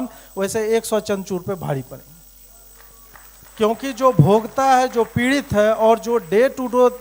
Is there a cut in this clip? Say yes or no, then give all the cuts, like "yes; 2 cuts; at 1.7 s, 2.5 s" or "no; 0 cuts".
no; 0 cuts